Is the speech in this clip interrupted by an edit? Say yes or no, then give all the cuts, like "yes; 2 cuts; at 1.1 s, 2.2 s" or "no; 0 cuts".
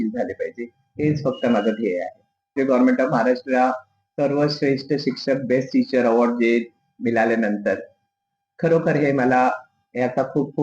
yes; 1 cut; at 2.5 s